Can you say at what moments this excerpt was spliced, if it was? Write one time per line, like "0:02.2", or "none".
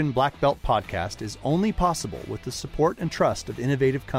none